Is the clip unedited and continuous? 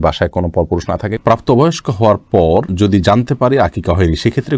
no; 1 cut; at 1.2 s

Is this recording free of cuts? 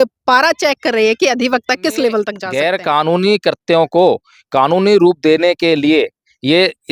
no; 1 cut; at 2.4 s

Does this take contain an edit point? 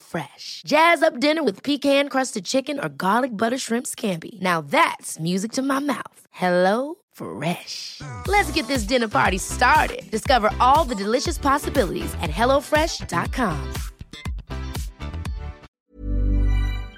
yes; 1 cut; at 15.7 s

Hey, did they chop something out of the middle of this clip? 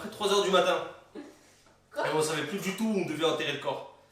no; 0 cuts

